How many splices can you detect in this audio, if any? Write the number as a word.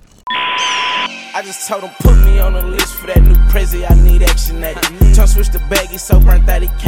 one